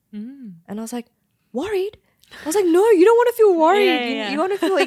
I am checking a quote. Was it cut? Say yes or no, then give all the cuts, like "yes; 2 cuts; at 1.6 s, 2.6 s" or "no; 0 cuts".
no; 0 cuts